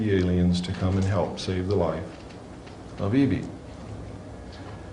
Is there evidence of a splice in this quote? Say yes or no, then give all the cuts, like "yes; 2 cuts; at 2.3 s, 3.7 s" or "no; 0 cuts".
no; 0 cuts